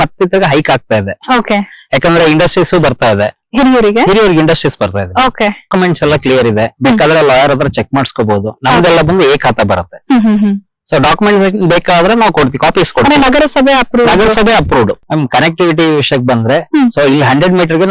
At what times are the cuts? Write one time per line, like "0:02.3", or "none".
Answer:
0:05.7
0:15.0